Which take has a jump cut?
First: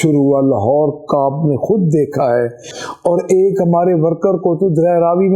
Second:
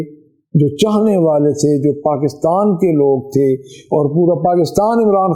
first; 1 cut; at 2.7 s

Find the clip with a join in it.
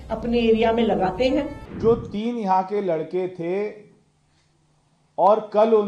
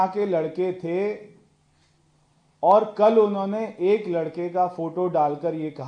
first; 1 cut; at 1.6 s

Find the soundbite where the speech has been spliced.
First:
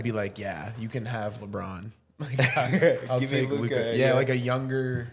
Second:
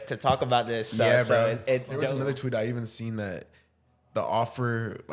second; 1 cut; at 1.9 s

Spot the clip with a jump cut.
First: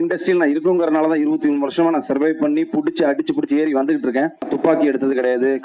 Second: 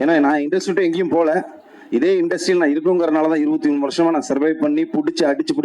first; 1 cut; at 4.5 s

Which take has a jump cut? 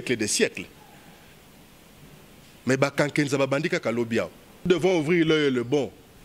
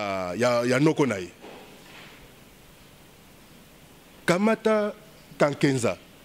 first; 1 cut; at 4.7 s

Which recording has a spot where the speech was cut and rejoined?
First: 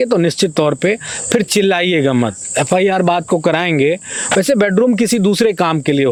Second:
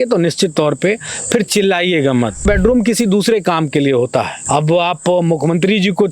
second; 2 cuts; at 2.4 s, 4.4 s

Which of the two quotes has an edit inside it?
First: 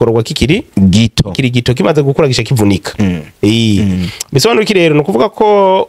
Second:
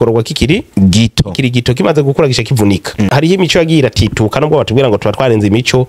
second; 1 cut; at 3.1 s

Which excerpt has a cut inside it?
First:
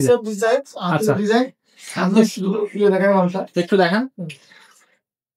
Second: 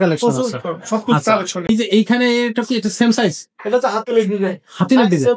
second; 1 cut; at 1.7 s

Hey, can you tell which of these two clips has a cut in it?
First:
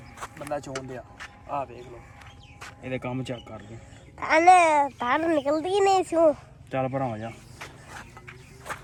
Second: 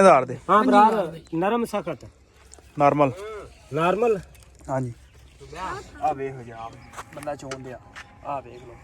second; 1 cut; at 5.6 s

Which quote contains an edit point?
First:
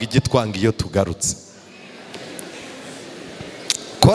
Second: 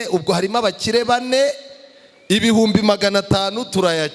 first; 1 cut; at 2.0 s

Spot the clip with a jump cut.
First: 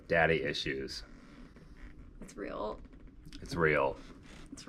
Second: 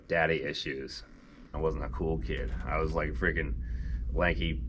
second; 1 cut; at 1.5 s

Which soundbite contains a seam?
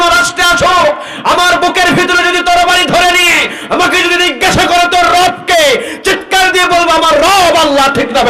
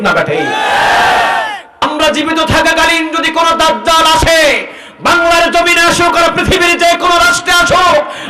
second; 1 cut; at 1.8 s

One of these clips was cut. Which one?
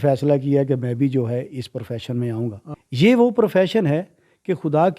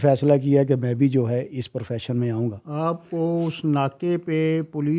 first; 1 cut; at 2.6 s

